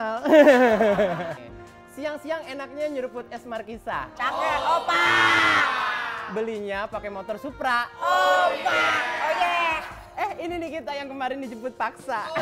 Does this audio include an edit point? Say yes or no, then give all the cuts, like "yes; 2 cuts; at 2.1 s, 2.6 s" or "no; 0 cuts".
yes; 1 cut; at 1.4 s